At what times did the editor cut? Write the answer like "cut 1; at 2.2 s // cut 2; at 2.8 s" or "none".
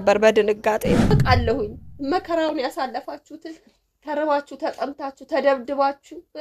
cut 1; at 1.1 s